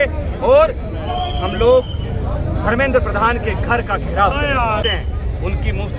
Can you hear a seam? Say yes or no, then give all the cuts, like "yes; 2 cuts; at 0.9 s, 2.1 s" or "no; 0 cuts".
yes; 1 cut; at 4.8 s